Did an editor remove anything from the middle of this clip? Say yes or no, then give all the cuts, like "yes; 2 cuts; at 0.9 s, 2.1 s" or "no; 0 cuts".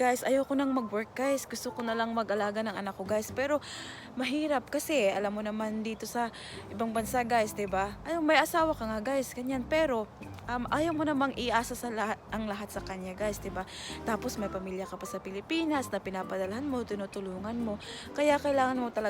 no; 0 cuts